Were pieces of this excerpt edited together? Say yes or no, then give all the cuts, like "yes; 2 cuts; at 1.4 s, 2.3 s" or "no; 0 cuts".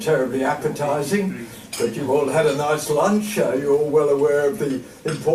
no; 0 cuts